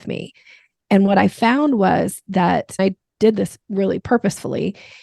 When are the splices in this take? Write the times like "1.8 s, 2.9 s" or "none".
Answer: 2.8 s, 4.0 s